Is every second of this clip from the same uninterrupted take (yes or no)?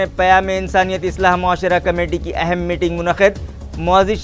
yes